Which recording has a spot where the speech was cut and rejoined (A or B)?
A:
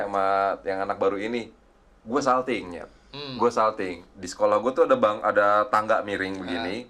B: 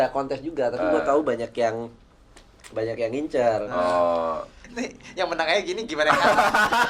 B